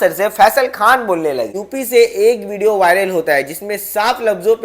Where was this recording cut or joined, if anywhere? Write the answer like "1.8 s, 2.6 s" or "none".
1.5 s